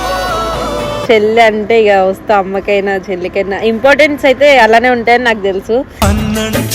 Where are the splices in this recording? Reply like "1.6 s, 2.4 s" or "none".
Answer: 0.9 s